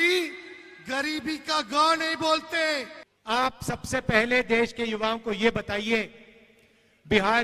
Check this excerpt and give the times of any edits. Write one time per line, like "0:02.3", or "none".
0:03.1